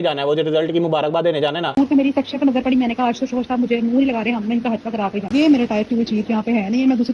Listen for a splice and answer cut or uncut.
cut